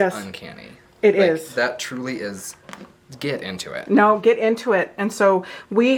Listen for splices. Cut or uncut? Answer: uncut